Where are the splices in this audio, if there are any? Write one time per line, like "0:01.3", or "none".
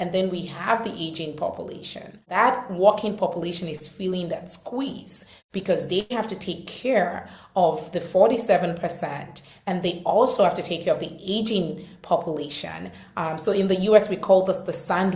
0:02.3